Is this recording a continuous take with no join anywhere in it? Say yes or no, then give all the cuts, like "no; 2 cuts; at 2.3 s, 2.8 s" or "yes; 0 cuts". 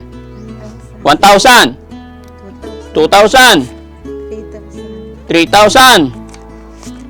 no; 1 cut; at 6.1 s